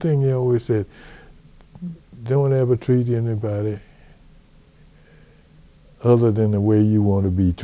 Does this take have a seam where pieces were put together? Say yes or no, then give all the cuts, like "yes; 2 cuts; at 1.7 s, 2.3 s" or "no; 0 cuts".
no; 0 cuts